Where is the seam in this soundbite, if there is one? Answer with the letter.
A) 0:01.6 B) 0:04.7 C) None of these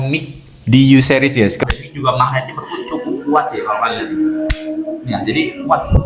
A